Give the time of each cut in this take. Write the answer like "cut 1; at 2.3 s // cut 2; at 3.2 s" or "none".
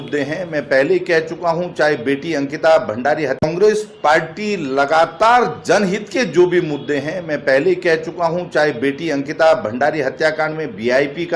cut 1; at 3.4 s